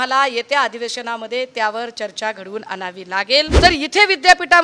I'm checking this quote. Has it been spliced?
yes; 1 cut; at 3.5 s

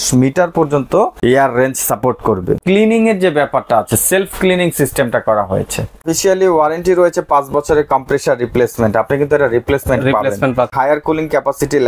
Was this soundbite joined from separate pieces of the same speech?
yes; 4 cuts; at 1.1 s, 2.6 s, 6.1 s, 10.7 s

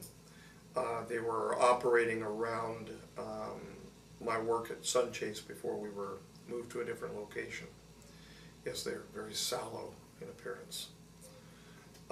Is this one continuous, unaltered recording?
yes; 0 cuts

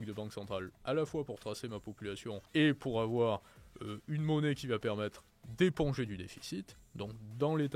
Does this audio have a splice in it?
yes; 1 cut; at 2.4 s

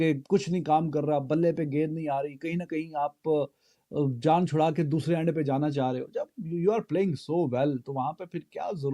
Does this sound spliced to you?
no; 0 cuts

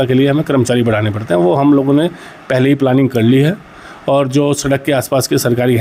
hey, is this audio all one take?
yes; 0 cuts

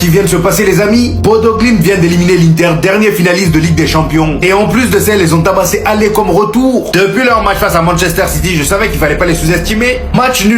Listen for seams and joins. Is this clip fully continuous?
yes; 0 cuts

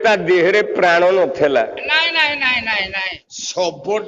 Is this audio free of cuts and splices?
no; 1 cut; at 3.1 s

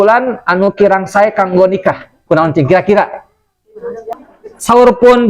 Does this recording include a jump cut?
yes; 1 cut; at 4.2 s

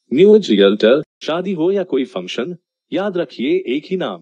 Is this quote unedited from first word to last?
no; 1 cut; at 1.2 s

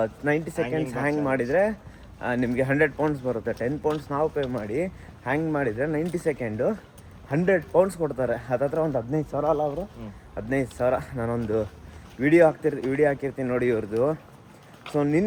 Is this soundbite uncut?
yes; 0 cuts

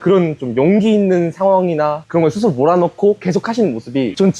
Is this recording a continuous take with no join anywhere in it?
yes; 0 cuts

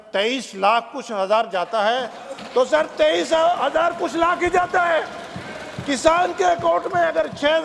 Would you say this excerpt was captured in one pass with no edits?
yes; 0 cuts

